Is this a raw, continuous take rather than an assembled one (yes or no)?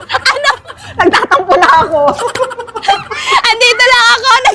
yes